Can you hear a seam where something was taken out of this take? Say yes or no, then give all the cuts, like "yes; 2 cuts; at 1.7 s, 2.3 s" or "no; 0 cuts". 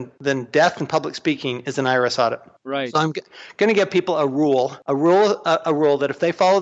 no; 0 cuts